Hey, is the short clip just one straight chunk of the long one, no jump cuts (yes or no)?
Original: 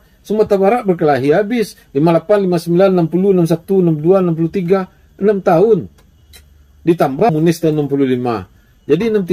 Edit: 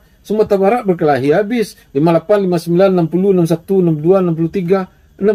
yes